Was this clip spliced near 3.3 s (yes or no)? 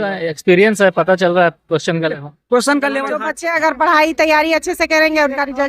yes